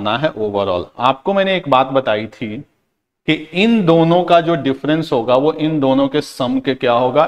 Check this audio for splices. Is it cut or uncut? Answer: uncut